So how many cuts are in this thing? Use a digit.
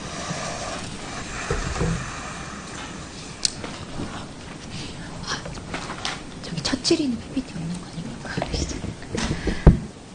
0